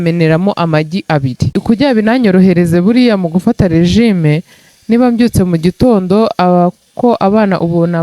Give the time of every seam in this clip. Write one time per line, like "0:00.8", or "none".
0:01.6